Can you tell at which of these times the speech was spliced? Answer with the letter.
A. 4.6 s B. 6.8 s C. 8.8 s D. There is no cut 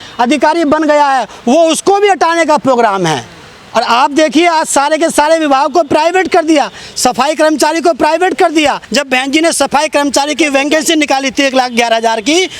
C